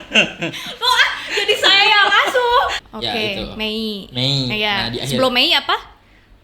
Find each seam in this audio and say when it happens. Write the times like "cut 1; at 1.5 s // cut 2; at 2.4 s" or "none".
cut 1; at 2.9 s